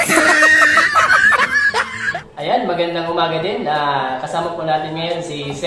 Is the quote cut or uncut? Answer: cut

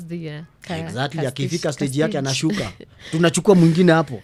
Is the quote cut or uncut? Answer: uncut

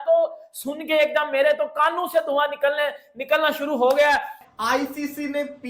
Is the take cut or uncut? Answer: cut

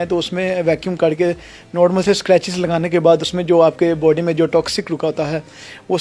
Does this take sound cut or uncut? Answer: uncut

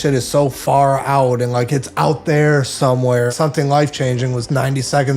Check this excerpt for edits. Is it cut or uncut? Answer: cut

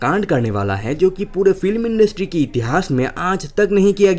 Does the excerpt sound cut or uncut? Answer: uncut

